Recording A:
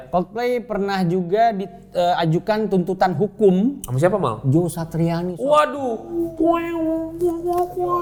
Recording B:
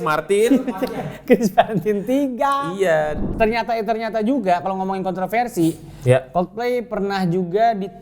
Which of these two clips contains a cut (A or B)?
B